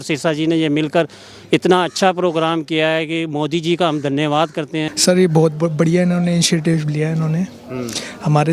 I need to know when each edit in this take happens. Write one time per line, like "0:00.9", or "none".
0:04.9